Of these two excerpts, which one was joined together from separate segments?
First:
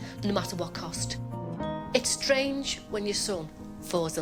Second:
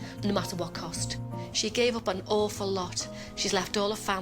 second; 1 cut; at 1.4 s

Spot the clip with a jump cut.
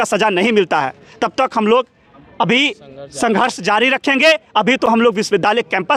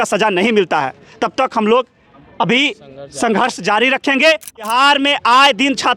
second; 1 cut; at 4.5 s

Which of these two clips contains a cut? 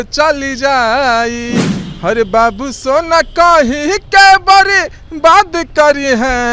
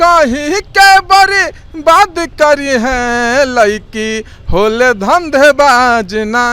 first; 1 cut; at 1.7 s

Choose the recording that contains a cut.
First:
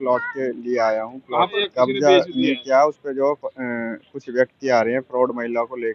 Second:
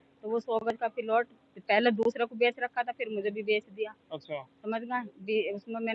first; 1 cut; at 1.5 s

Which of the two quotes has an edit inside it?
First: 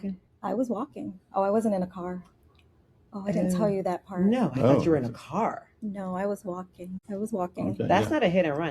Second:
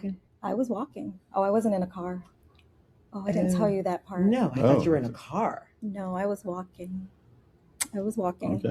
first; 1 cut; at 7.0 s

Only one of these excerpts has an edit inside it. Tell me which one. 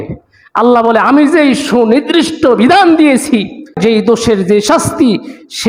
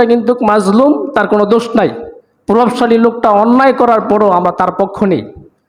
first; 1 cut; at 3.8 s

